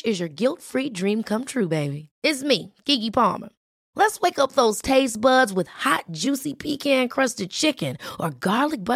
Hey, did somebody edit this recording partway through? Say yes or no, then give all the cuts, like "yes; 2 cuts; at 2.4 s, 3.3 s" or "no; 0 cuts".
no; 0 cuts